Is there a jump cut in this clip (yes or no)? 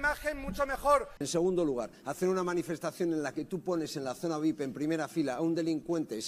yes